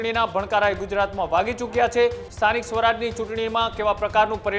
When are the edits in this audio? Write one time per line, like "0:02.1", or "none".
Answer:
0:02.2